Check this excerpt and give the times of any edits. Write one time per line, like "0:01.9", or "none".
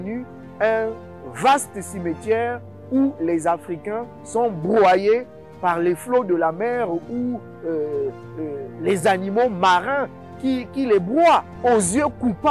0:11.5